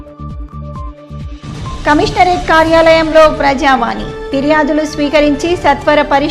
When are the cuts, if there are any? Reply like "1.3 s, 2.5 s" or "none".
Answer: 1.2 s